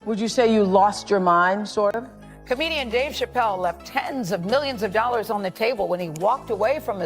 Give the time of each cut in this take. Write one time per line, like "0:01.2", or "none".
0:01.9